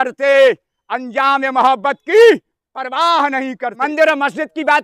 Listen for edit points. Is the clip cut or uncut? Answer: cut